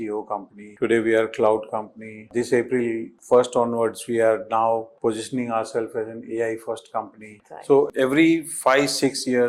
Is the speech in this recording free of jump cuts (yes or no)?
yes